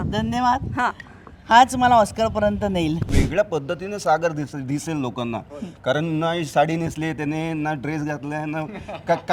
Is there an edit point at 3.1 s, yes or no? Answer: yes